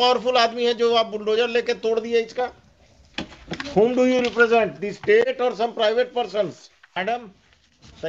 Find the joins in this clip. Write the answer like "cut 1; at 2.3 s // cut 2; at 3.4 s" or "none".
cut 1; at 7.0 s